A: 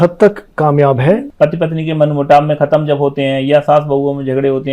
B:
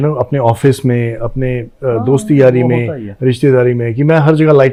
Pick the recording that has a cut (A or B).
A